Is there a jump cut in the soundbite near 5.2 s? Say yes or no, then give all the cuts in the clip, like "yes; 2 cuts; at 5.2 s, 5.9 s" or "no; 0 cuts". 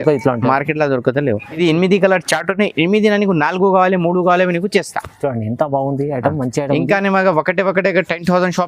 no; 1 cut; at 1.5 s